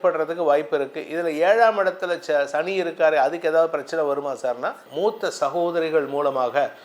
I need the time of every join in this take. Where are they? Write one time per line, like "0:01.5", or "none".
0:04.8